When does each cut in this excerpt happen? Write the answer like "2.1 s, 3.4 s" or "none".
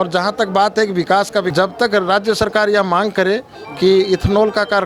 1.5 s